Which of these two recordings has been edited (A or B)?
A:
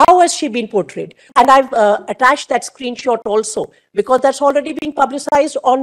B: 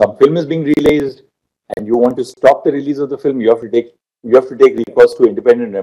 A